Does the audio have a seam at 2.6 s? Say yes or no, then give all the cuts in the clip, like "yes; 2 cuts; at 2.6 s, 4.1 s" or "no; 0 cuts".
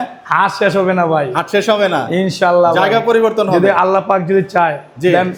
no; 0 cuts